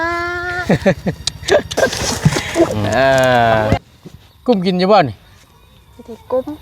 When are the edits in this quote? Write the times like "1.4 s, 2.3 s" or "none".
3.8 s

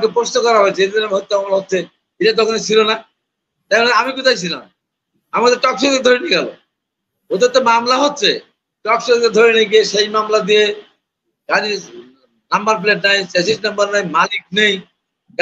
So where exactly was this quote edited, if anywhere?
none

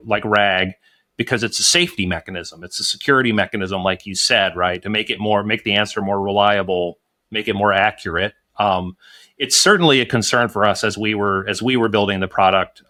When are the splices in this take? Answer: none

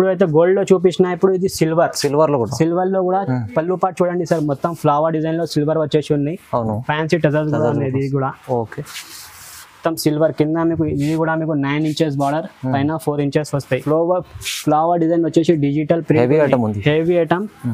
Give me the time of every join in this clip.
13.8 s

